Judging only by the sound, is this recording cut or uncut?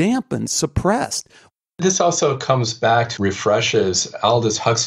cut